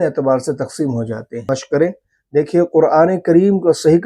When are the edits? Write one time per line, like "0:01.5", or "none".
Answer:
0:01.5